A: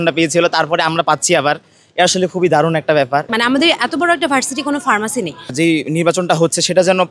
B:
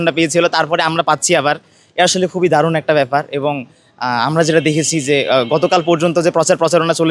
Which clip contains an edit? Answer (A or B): A